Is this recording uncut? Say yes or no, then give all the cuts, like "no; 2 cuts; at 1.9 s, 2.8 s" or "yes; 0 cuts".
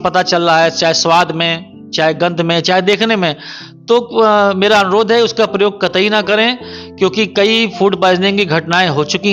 yes; 0 cuts